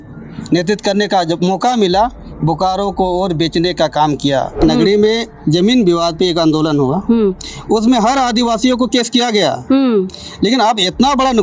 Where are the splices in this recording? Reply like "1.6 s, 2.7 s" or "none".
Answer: 4.6 s